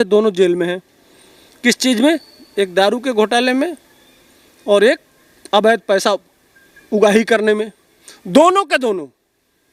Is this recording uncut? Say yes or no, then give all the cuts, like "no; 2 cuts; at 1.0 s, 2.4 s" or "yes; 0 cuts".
yes; 0 cuts